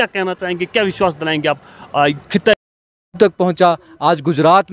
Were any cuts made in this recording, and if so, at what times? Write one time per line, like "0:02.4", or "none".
0:03.2